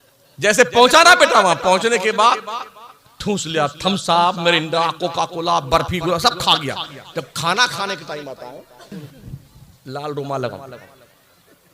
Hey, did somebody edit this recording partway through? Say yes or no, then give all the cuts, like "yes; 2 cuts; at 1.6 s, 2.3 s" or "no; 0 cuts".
yes; 1 cut; at 9.0 s